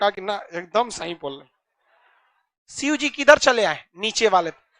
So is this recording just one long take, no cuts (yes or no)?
yes